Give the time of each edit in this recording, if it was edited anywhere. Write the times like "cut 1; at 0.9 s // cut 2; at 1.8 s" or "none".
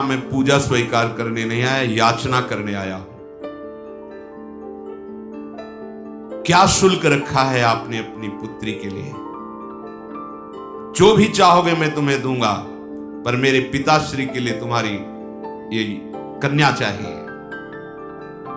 none